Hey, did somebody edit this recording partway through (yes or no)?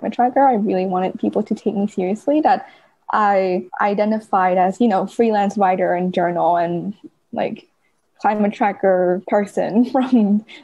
yes